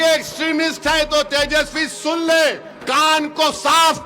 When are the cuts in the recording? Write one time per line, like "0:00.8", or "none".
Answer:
0:02.7